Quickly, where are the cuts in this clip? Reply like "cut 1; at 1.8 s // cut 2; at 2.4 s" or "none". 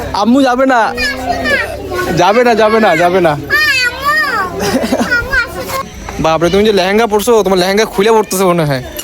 cut 1; at 5.9 s